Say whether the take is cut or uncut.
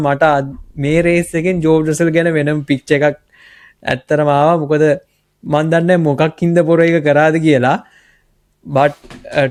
uncut